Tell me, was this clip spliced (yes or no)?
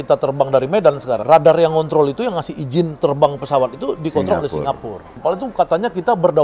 yes